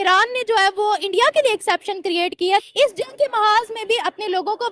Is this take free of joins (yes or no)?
no